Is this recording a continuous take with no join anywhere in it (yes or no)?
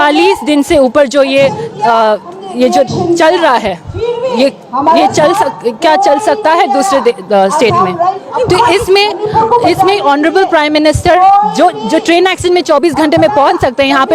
no